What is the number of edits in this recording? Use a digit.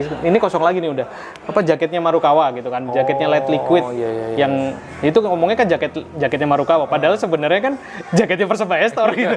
0